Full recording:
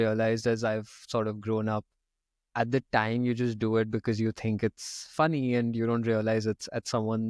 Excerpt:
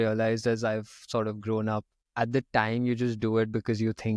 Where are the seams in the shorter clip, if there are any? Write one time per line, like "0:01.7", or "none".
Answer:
0:02.0